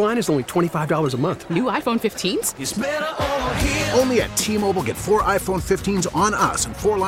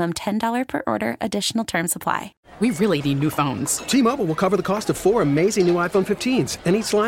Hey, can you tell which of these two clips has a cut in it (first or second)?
second